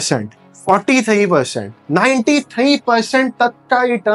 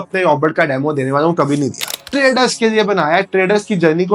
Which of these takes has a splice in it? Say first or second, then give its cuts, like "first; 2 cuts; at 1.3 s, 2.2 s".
second; 1 cut; at 2.0 s